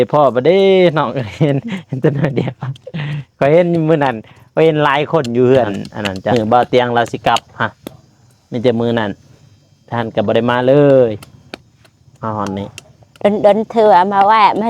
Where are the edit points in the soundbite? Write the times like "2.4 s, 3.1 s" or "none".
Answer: 6.2 s